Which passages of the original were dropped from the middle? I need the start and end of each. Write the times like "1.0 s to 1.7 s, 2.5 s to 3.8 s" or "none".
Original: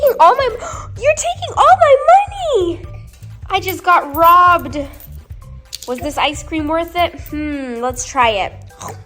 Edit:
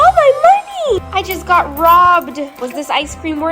2.6 s to 3.4 s, 4.9 s to 5.8 s